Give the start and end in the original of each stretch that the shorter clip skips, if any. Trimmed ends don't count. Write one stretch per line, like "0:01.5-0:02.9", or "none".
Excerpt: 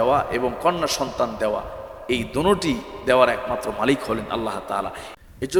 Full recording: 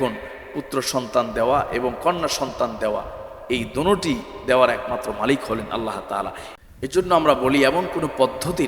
none